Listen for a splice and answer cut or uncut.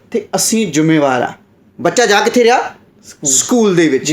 uncut